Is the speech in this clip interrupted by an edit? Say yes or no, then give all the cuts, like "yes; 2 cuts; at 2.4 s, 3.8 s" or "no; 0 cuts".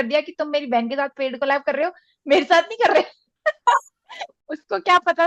no; 0 cuts